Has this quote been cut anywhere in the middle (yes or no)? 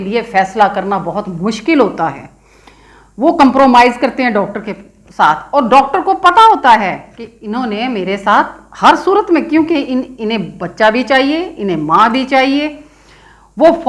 no